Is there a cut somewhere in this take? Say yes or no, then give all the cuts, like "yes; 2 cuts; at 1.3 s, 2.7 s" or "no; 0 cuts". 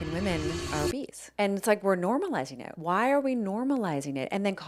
yes; 2 cuts; at 1.0 s, 2.7 s